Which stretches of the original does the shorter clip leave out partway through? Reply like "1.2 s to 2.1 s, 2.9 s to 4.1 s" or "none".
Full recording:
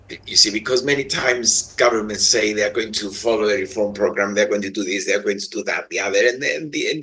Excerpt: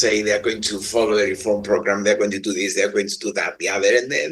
none